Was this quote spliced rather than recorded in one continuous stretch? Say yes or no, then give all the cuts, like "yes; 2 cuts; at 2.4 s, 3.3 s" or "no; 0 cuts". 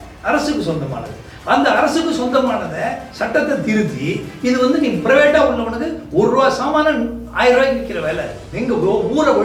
yes; 1 cut; at 8.4 s